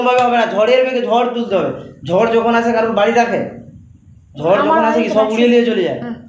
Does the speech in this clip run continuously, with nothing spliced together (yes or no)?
yes